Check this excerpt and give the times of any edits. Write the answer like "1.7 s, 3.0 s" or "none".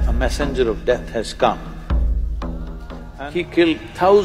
3.0 s